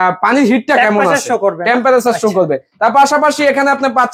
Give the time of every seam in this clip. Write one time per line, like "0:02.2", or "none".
none